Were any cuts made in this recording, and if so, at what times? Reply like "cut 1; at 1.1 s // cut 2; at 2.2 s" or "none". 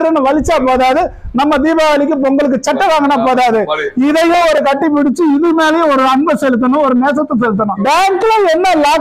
cut 1; at 7.7 s